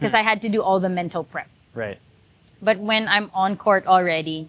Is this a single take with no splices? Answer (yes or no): yes